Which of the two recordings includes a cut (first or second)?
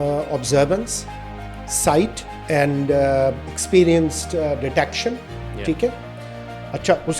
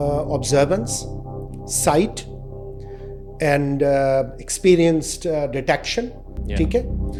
first